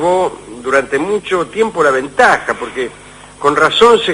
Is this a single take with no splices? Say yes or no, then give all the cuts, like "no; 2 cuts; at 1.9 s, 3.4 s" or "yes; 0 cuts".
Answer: no; 1 cut; at 0.9 s